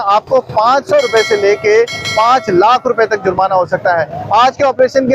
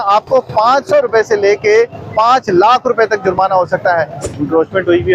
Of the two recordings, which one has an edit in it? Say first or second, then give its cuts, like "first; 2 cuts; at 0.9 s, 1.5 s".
second; 1 cut; at 4.2 s